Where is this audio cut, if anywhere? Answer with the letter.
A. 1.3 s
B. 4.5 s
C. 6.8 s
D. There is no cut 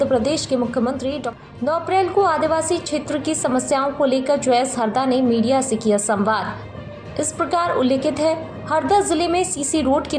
A